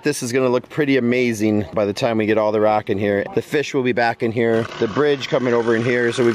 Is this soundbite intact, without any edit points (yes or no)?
no